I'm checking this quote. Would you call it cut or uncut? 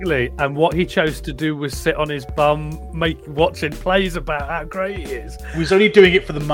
cut